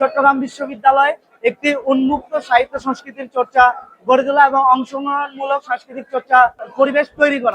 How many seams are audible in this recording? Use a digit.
1